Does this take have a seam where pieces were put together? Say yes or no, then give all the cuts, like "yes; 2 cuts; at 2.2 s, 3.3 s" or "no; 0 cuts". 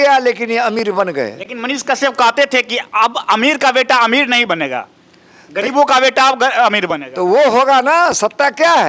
no; 0 cuts